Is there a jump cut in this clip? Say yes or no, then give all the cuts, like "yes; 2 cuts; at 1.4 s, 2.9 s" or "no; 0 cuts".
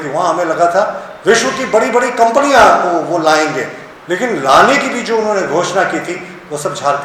no; 0 cuts